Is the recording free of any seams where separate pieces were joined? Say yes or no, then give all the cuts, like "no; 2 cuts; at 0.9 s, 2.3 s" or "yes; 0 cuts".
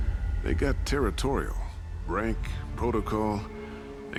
yes; 0 cuts